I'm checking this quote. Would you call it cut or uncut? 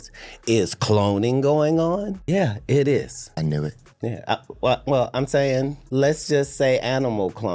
cut